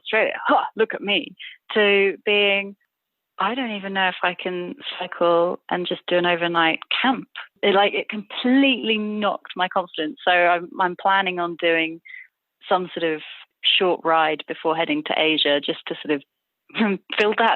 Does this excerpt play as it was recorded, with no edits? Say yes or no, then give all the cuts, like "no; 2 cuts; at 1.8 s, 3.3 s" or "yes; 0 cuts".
no; 1 cut; at 7.5 s